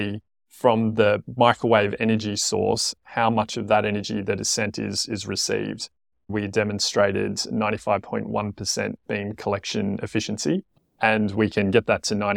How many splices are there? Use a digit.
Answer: 2